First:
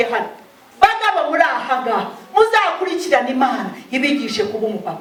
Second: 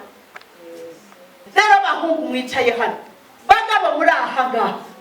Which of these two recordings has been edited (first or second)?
second